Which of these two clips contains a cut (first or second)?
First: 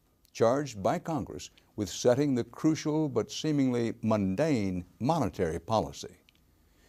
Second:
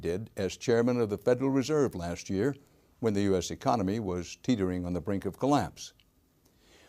second